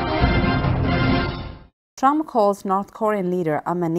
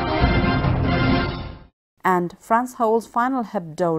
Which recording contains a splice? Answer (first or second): second